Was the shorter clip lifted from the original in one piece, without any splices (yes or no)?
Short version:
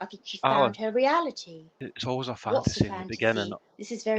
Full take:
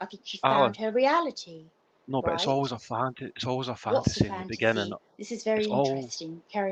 no